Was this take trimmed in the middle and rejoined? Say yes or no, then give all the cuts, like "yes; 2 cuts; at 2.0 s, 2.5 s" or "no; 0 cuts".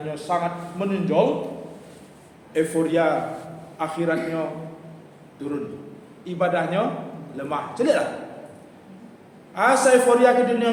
no; 0 cuts